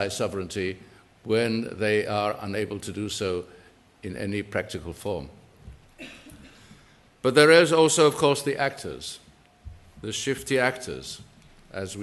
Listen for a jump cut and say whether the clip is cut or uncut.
uncut